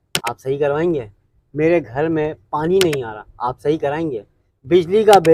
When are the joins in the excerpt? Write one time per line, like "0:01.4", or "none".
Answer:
none